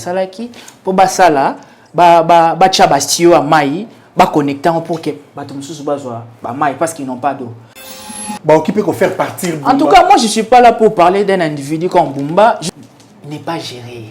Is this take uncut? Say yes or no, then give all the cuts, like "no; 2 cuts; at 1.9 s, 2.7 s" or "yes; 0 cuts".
no; 2 cuts; at 8.1 s, 12.7 s